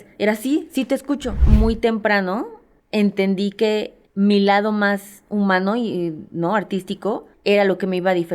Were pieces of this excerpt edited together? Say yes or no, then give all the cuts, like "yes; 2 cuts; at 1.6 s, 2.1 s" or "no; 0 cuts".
yes; 1 cut; at 1.4 s